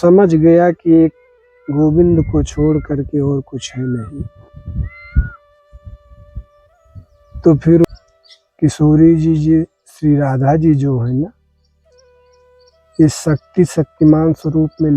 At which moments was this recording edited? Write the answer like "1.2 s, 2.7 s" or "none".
7.8 s